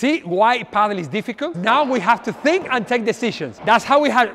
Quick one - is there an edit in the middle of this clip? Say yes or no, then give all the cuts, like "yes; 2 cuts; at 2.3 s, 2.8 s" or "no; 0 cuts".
yes; 2 cuts; at 1.6 s, 3.5 s